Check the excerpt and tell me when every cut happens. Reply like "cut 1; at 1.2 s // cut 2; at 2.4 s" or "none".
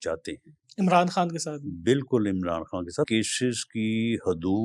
cut 1; at 3.1 s

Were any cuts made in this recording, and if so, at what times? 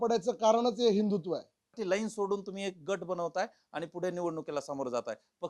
cut 1; at 1.8 s

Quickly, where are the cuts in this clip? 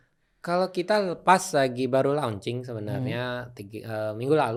none

